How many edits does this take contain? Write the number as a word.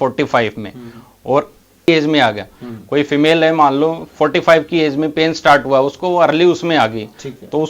one